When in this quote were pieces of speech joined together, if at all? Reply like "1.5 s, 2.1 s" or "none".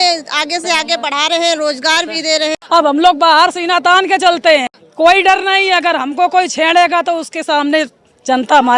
2.5 s, 4.8 s